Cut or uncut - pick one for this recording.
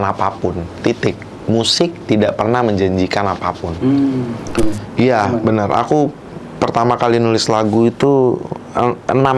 cut